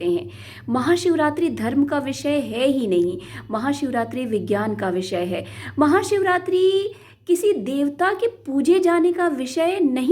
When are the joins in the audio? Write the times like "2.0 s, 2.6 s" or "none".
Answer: none